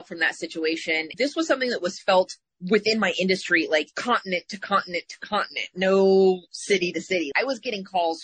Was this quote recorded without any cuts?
no; 2 cuts; at 1.1 s, 7.3 s

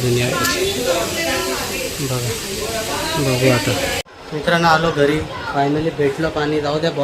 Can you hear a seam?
yes; 1 cut; at 4.1 s

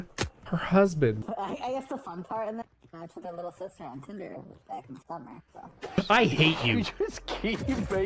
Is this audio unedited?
no; 2 cuts; at 1.2 s, 6.0 s

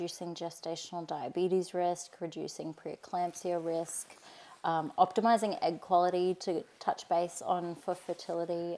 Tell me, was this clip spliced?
no; 0 cuts

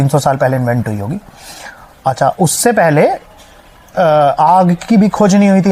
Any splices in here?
no; 0 cuts

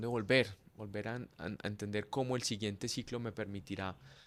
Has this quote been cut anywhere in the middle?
no; 0 cuts

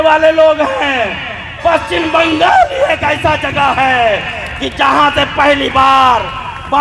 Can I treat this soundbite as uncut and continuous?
yes; 0 cuts

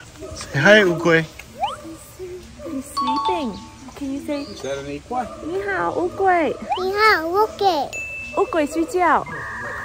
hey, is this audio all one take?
yes; 0 cuts

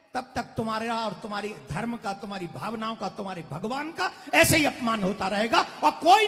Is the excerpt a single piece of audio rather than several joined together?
yes; 0 cuts

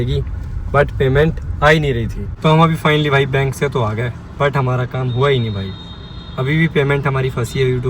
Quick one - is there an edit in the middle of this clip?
yes; 1 cut; at 2.2 s

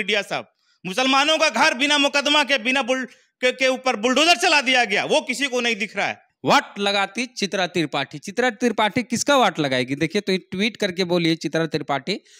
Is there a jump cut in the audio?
yes; 1 cut; at 6.3 s

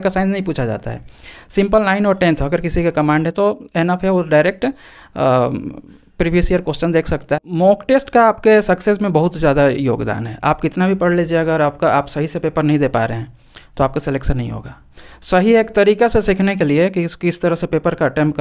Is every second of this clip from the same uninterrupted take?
no; 1 cut; at 7.4 s

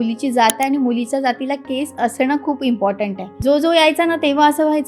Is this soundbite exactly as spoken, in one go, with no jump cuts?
no; 1 cut; at 3.3 s

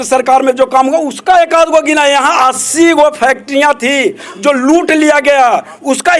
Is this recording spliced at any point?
no; 0 cuts

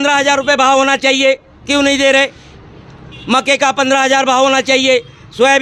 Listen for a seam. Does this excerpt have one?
no; 0 cuts

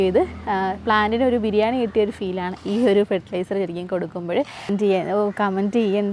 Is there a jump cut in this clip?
yes; 1 cut; at 4.7 s

